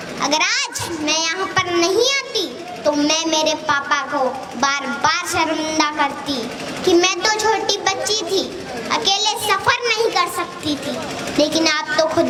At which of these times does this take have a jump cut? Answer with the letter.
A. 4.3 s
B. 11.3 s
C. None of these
C